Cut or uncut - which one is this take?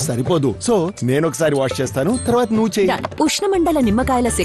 uncut